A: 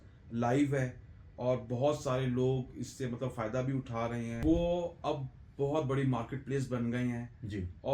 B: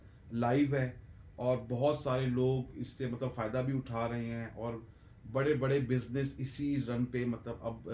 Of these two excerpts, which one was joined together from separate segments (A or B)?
A